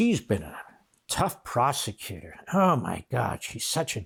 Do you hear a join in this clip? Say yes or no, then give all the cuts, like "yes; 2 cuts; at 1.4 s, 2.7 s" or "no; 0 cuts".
no; 0 cuts